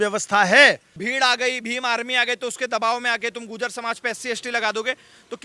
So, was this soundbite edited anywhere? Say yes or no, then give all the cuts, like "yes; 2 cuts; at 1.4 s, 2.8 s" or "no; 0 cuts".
yes; 1 cut; at 0.9 s